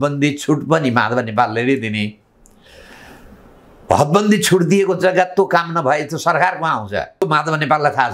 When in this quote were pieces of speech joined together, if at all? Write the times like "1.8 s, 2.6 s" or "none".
7.2 s